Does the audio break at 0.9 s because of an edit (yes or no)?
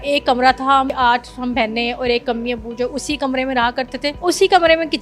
yes